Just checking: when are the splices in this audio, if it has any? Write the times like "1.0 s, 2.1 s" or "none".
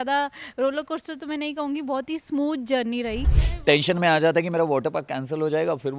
3.4 s